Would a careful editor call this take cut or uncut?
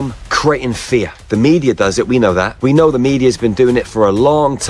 cut